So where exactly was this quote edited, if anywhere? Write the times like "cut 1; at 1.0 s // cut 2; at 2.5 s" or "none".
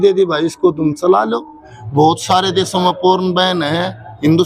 cut 1; at 1.6 s